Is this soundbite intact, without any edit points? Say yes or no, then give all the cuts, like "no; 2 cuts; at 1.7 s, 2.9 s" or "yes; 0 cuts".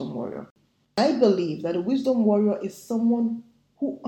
no; 1 cut; at 0.9 s